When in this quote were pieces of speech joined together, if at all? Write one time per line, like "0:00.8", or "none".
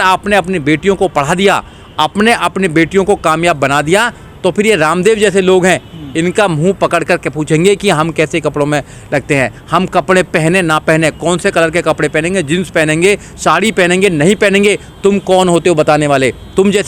none

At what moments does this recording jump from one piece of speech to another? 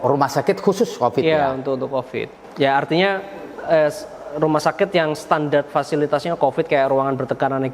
0:02.4

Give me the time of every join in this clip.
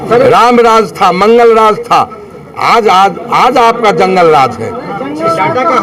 none

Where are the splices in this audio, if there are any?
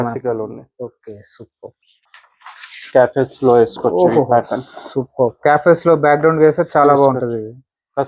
0:02.0

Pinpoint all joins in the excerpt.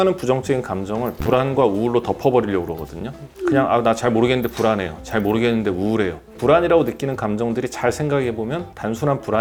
none

